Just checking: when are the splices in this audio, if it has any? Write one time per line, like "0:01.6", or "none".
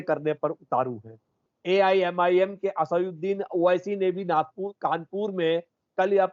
0:01.5